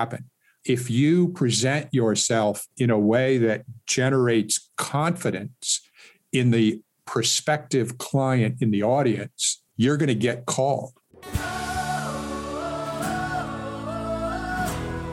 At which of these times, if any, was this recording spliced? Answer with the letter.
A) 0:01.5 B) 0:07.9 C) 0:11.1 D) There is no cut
C